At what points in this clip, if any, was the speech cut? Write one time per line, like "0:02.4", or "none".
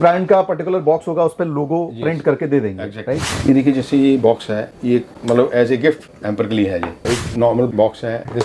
0:03.3
0:07.0

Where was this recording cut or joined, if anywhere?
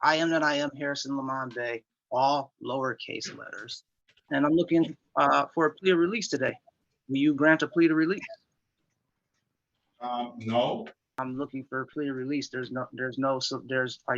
0:04.2
0:11.1

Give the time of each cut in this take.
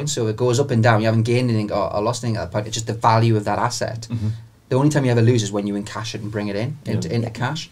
none

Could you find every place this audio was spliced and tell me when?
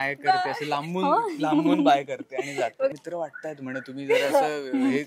0:02.9

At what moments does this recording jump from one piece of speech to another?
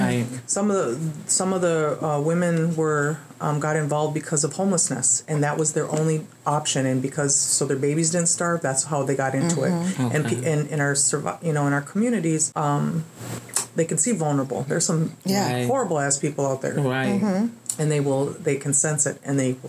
0:12.5

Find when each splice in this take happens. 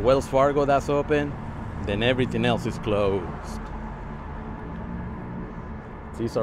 none

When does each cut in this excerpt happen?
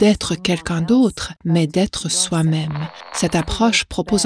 0:01.3
0:03.0

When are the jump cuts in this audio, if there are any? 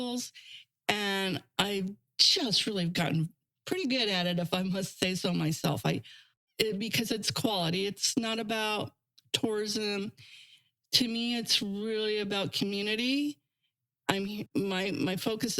0:06.3
0:14.5

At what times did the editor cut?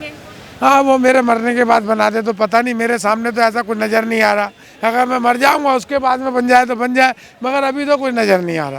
none

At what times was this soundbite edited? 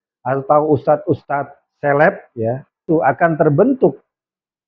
0:02.8

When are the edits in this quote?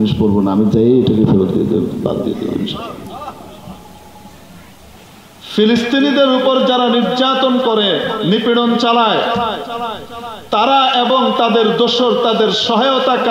0:05.0

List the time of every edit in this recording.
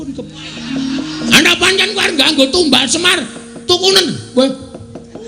0:01.3

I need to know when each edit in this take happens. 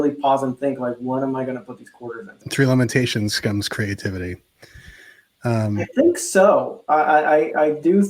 0:02.4

